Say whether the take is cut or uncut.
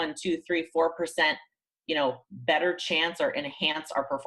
uncut